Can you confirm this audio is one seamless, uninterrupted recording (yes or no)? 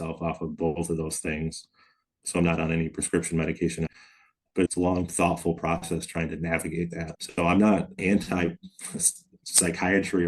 no